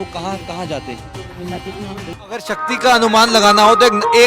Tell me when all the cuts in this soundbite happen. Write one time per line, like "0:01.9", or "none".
0:02.2